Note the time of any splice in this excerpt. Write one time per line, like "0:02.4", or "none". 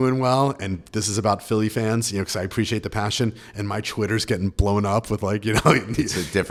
none